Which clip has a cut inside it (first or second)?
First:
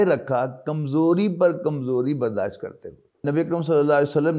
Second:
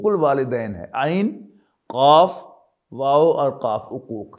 first